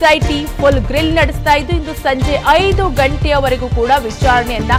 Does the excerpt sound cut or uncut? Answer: uncut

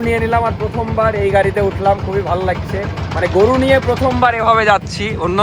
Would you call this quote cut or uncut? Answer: uncut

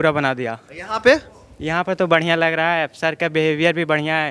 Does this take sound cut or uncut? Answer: uncut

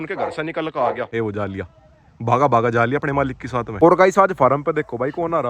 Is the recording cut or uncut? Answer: cut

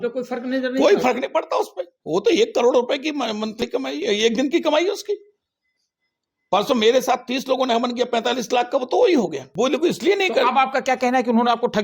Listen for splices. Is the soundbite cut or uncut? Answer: cut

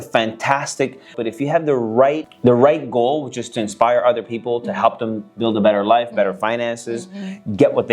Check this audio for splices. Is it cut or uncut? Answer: cut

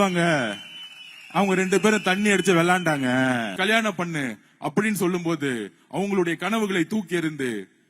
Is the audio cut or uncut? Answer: cut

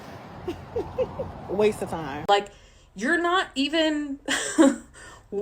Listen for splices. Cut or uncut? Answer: cut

